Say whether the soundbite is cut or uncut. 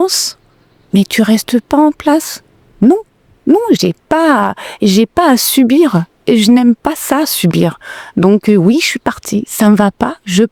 uncut